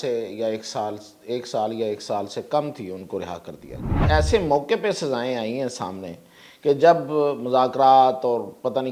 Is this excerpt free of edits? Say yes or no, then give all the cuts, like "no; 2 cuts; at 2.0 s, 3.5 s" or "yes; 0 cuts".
no; 1 cut; at 4.0 s